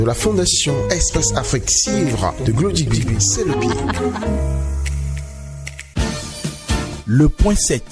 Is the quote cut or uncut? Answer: cut